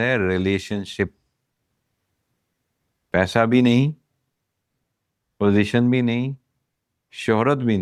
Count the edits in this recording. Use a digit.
0